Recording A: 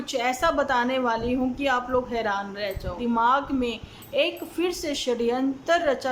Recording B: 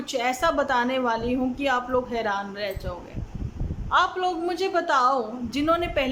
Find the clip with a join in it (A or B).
A